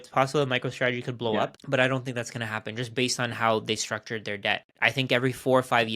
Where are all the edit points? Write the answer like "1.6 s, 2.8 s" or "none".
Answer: 1.6 s